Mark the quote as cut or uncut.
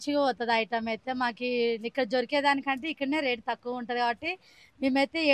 uncut